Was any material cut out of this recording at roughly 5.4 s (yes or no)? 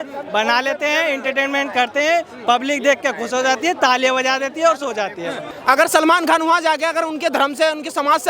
yes